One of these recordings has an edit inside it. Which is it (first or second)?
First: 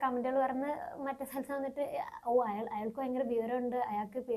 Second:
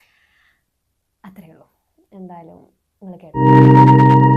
second